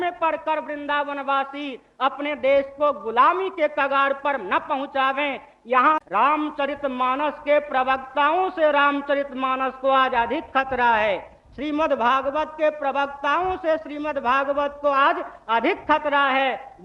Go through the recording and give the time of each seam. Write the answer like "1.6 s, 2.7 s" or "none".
6.0 s